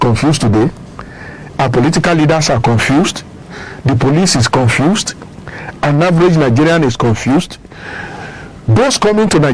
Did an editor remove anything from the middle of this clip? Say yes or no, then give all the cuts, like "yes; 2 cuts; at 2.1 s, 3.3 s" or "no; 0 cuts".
no; 0 cuts